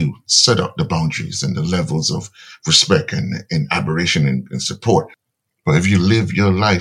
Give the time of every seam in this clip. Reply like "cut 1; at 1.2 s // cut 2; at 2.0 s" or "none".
cut 1; at 5.2 s